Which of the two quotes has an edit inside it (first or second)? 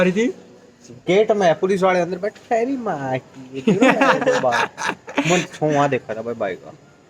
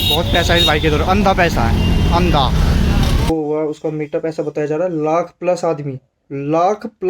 second